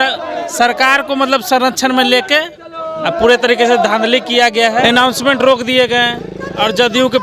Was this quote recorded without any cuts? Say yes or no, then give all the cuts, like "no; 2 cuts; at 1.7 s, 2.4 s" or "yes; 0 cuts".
no; 1 cut; at 4.8 s